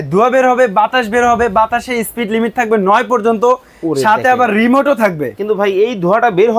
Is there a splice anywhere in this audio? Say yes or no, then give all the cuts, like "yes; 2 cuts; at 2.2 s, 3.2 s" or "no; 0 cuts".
no; 0 cuts